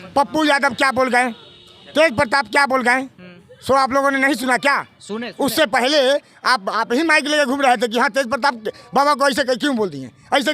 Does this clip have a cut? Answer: no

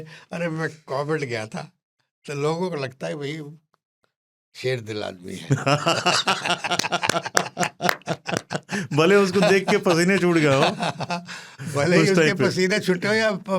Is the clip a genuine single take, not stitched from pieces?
yes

